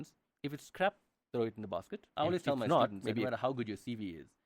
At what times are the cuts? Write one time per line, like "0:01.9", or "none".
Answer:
0:03.2

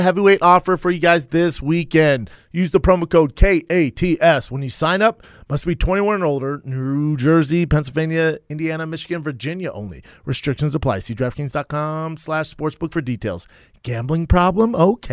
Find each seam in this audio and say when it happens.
0:02.4
0:05.3

